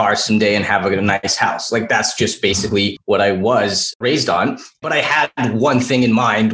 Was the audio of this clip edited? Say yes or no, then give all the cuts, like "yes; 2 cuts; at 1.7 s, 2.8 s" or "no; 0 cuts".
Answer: yes; 3 cuts; at 1.3 s, 3.0 s, 4.0 s